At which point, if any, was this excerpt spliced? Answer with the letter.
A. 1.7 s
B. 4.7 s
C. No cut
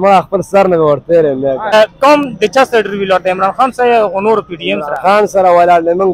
A